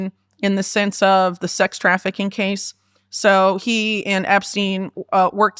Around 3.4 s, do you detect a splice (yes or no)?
no